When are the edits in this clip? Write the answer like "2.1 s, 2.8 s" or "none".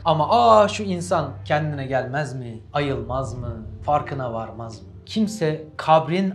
4.9 s